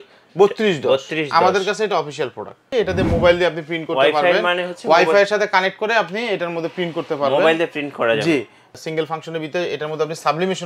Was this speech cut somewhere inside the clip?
yes; 2 cuts; at 2.7 s, 8.6 s

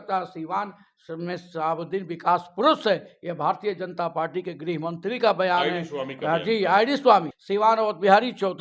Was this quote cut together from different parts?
yes; 1 cut; at 7.4 s

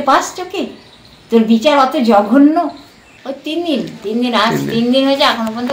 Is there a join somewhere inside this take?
yes; 1 cut; at 2.5 s

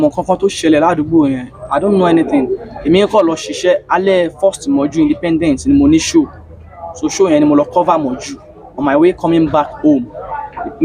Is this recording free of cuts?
yes; 0 cuts

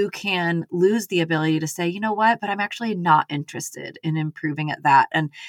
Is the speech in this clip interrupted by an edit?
no; 0 cuts

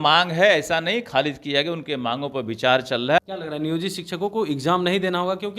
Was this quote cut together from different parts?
yes; 1 cut; at 3.2 s

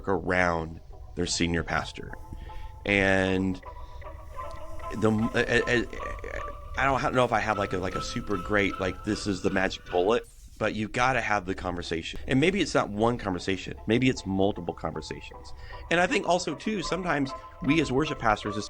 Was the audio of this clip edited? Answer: yes; 1 cut; at 12.1 s

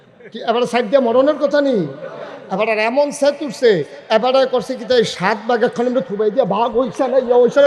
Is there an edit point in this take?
no; 0 cuts

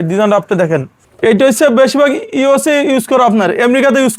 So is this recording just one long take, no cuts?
no; 1 cut; at 1.0 s

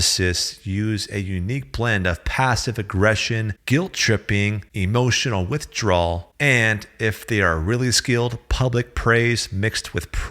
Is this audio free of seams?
no; 3 cuts; at 3.5 s, 4.7 s, 6.3 s

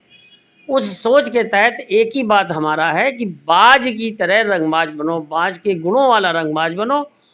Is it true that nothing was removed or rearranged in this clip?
yes; 0 cuts

